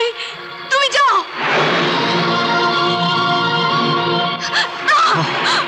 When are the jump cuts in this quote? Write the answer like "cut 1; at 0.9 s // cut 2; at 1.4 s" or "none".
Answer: none